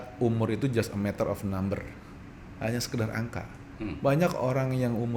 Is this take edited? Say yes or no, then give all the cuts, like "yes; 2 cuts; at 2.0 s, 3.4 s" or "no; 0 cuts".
no; 0 cuts